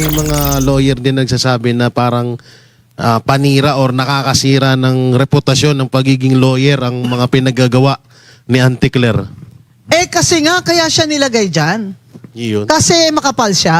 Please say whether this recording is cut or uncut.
uncut